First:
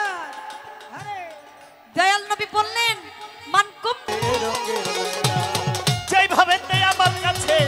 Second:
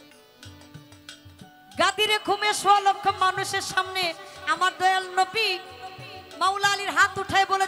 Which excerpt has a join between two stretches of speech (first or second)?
first